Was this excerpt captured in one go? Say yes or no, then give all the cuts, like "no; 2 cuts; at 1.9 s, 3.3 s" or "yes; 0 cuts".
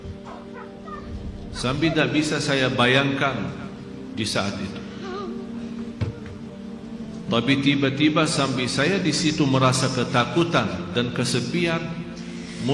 yes; 0 cuts